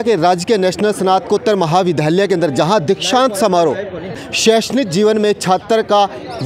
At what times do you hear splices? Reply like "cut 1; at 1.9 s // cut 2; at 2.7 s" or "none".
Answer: cut 1; at 4.2 s